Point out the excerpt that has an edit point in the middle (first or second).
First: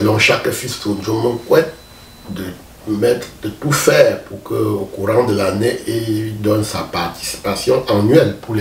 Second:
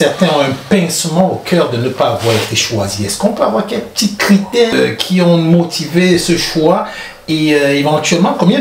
second